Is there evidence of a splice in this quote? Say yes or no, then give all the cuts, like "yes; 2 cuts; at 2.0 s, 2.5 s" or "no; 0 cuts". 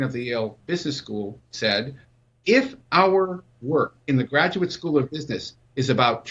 yes; 2 cuts; at 1.1 s, 4.0 s